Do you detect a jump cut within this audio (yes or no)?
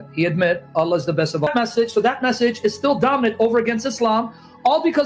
yes